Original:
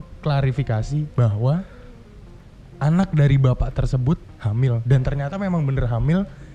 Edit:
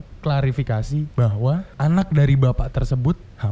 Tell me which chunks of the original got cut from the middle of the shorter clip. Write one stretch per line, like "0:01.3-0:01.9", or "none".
0:01.7-0:02.7